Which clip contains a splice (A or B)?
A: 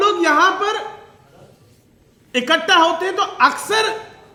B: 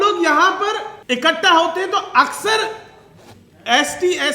B